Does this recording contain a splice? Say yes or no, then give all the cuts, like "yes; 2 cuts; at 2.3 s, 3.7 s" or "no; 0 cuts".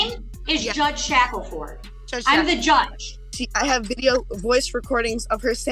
yes; 1 cut; at 3.3 s